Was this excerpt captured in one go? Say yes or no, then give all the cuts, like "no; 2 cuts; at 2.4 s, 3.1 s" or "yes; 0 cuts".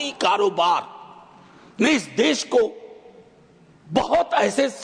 yes; 0 cuts